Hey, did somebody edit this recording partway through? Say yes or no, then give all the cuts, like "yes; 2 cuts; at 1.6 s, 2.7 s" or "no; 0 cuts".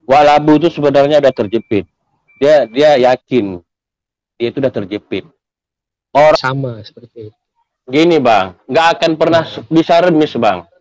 yes; 1 cut; at 6.4 s